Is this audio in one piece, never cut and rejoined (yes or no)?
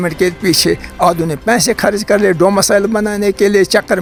yes